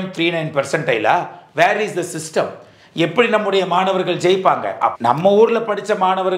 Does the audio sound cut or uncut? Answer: cut